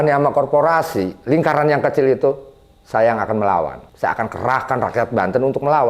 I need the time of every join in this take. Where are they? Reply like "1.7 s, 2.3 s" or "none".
3.8 s